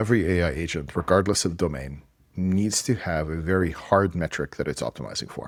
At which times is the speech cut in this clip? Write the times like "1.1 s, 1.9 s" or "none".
none